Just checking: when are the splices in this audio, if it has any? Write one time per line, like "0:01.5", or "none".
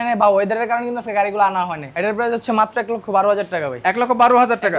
0:01.8